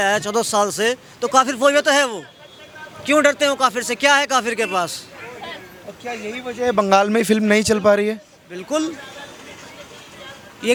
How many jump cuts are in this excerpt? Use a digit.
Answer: 0